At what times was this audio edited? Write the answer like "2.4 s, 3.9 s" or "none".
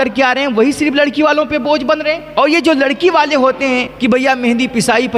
2.2 s, 3.9 s